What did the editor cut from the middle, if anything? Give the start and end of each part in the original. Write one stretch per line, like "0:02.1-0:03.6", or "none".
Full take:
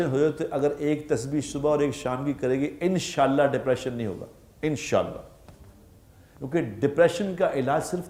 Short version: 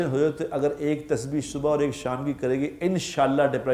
none